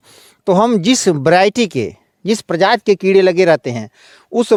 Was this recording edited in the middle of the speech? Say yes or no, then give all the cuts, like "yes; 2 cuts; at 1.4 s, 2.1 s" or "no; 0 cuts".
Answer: no; 0 cuts